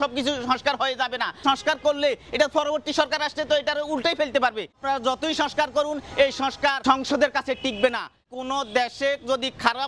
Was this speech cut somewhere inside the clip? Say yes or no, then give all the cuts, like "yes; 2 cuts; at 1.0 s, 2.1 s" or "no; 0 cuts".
yes; 4 cuts; at 1.4 s, 4.8 s, 6.8 s, 8.2 s